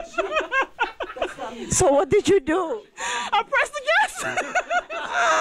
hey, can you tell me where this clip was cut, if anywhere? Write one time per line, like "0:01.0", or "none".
none